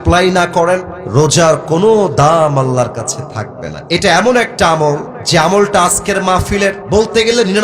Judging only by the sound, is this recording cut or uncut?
cut